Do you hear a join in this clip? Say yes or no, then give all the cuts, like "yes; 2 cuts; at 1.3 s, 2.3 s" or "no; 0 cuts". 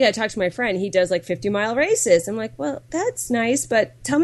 no; 0 cuts